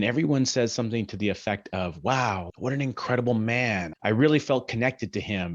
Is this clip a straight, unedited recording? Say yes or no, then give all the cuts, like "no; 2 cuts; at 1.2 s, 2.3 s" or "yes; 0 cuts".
no; 2 cuts; at 2.5 s, 3.9 s